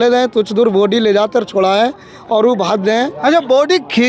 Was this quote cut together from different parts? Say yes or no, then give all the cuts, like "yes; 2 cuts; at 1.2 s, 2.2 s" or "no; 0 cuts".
no; 0 cuts